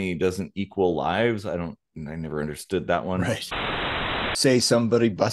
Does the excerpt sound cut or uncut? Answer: cut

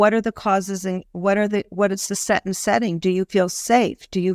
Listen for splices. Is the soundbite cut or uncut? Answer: uncut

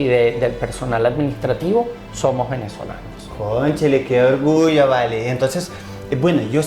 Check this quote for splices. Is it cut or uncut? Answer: uncut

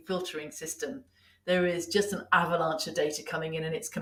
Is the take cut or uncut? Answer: uncut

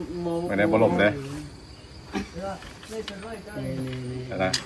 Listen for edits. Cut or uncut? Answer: uncut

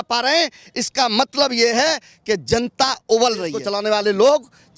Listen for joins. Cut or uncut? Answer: cut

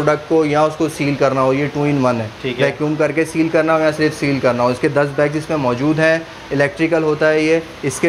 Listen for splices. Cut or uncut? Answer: uncut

